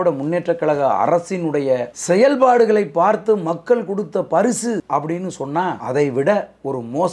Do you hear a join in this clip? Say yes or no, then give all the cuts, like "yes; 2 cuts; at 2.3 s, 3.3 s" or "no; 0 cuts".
yes; 3 cuts; at 1.9 s, 4.8 s, 5.8 s